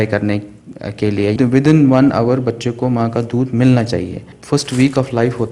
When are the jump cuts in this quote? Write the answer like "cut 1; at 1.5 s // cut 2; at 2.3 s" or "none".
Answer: cut 1; at 1.4 s // cut 2; at 4.3 s